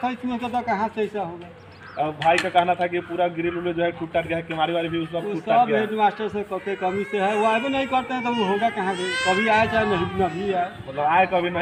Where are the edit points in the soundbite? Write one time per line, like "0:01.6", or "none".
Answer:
none

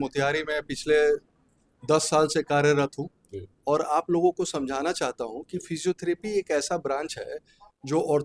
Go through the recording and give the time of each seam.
none

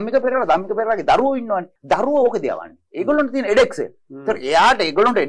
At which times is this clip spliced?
0:01.7

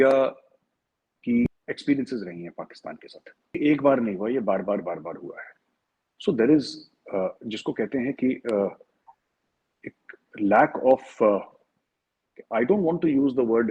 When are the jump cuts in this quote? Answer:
0:01.5
0:03.6

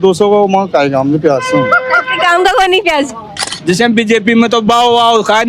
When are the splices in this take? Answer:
0:03.5

